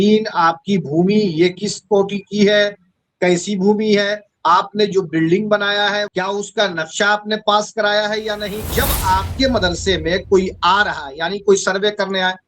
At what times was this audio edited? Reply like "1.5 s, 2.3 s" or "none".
6.0 s, 8.7 s